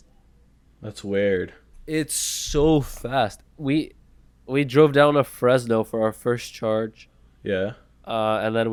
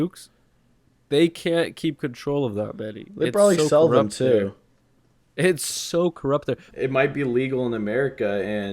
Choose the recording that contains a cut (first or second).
second